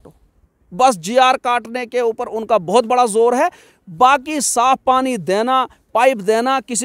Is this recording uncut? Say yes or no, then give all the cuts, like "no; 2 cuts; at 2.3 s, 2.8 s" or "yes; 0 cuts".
yes; 0 cuts